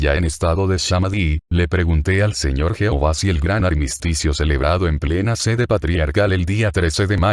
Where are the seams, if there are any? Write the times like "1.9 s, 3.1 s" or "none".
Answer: 1.4 s